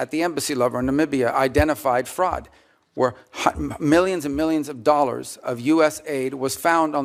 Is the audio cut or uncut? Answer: uncut